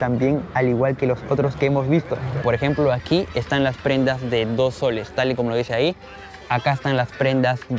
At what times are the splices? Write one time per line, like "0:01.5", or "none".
0:02.4